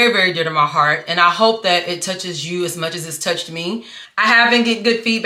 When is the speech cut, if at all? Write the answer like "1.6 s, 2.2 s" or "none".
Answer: none